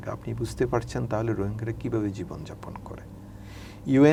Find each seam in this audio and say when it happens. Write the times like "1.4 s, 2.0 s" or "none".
none